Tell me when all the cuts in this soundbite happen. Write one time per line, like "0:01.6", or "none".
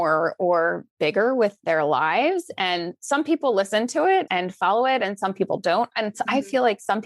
0:04.4